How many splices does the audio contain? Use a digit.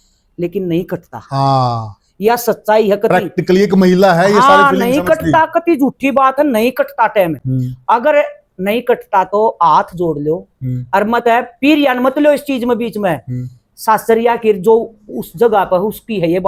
0